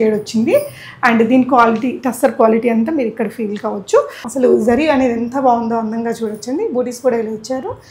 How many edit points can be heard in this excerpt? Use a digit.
1